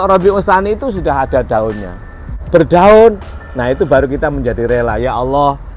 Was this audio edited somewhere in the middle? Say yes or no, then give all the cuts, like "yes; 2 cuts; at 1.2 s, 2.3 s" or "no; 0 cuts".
yes; 1 cut; at 2.4 s